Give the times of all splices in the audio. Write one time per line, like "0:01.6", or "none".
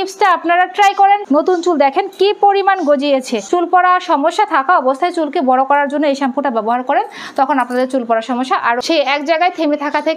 0:01.2
0:03.4
0:08.8